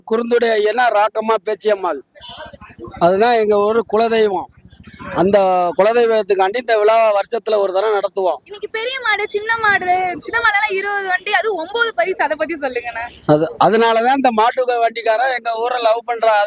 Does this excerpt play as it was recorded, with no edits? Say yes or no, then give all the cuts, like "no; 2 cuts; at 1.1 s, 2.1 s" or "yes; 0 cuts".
yes; 0 cuts